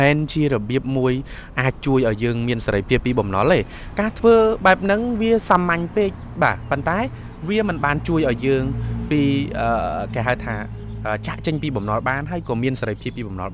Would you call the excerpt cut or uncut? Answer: uncut